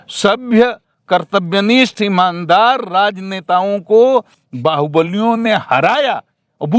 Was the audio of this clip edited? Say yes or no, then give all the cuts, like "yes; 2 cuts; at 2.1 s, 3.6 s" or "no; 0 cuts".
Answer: no; 0 cuts